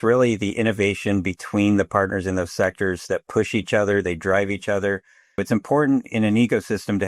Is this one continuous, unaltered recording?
no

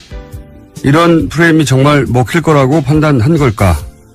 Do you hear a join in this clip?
no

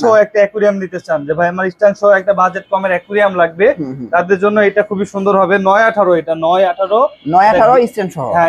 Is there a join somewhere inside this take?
no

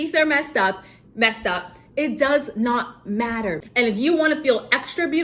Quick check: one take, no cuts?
no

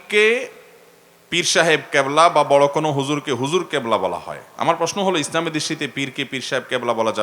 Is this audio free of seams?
yes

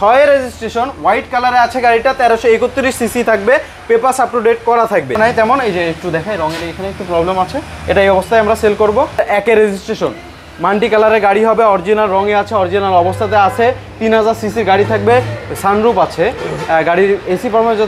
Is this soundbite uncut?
no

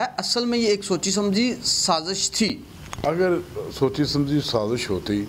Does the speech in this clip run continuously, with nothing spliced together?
yes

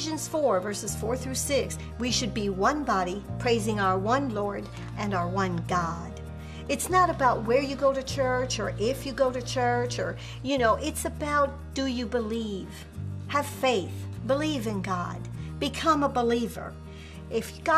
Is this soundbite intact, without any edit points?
yes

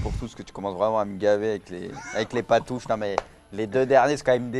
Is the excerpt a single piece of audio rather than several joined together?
no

